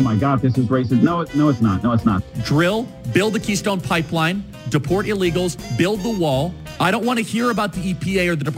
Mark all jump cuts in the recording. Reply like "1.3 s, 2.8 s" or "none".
2.3 s